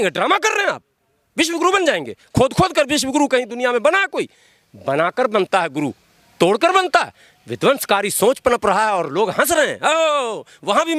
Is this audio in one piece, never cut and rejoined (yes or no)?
yes